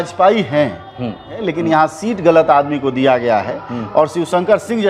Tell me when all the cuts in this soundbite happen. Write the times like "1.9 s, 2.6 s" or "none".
1.4 s